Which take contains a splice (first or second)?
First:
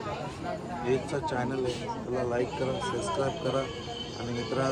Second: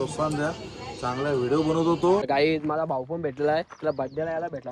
second